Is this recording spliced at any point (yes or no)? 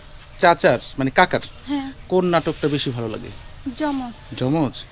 no